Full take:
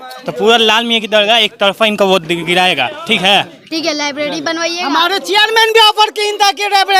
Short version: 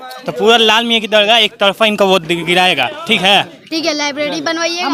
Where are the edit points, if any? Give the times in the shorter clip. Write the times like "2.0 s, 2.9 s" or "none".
none

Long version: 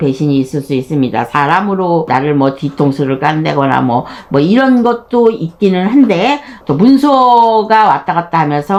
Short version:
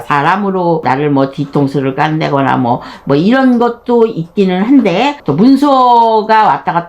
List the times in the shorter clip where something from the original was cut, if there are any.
5.2 s

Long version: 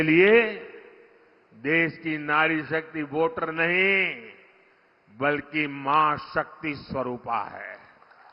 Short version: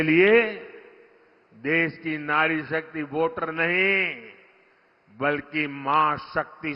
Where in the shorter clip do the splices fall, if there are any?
none

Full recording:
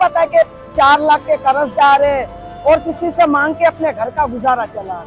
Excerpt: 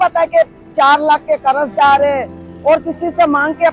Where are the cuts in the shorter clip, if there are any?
none

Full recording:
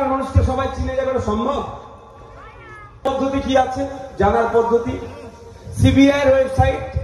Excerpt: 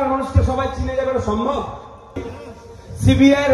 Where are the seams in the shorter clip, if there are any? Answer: 2.2 s

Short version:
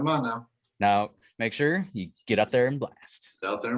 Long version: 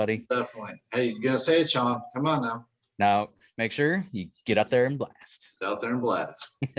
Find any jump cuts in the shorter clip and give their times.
none

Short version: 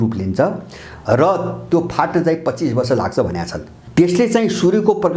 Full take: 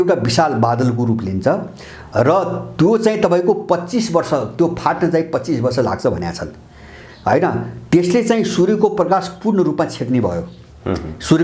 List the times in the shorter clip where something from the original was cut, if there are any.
1.6 s, 3.8 s

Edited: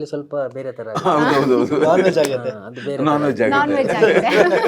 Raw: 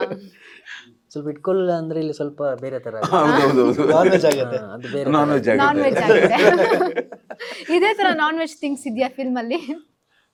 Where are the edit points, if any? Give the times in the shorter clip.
none

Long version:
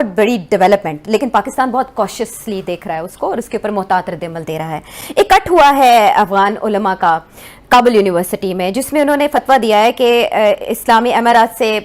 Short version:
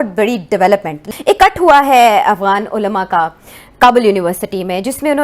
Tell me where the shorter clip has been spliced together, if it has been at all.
1.0 s

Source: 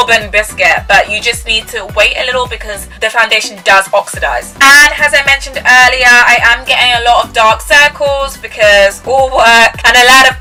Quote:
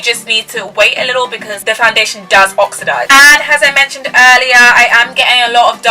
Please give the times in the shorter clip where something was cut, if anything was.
1.5 s, 3.1 s

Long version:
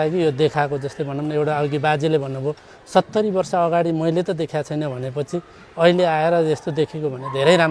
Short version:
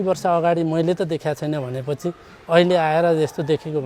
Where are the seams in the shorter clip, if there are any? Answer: none

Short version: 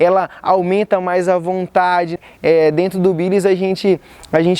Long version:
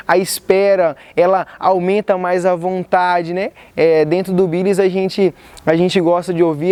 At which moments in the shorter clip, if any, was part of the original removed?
2.2 s

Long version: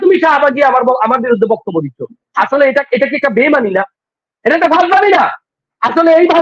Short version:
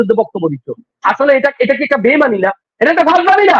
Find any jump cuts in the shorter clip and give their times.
2.6 s

